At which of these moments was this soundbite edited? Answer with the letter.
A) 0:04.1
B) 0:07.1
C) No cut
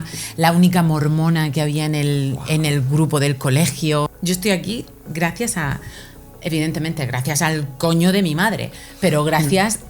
A